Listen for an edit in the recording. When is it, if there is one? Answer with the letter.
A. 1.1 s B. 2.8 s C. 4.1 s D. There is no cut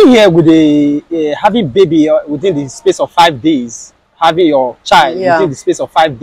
D